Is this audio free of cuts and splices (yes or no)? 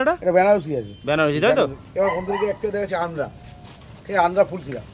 no